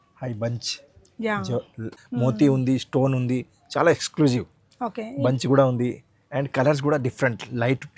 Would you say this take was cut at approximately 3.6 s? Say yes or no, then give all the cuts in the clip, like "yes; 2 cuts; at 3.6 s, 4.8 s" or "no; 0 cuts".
no; 1 cut; at 2.0 s